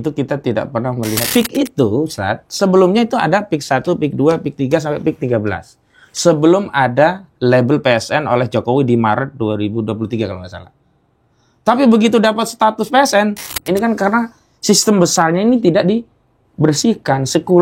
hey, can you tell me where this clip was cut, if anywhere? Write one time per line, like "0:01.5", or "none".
0:01.2
0:13.5